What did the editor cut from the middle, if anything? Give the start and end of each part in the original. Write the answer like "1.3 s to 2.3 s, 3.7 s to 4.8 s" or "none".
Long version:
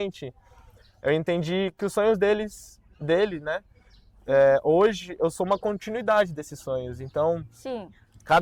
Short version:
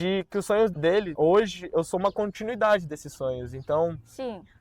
2.6 s to 4.6 s